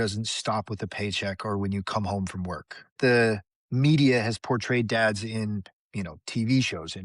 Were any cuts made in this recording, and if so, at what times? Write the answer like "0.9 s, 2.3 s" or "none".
3.0 s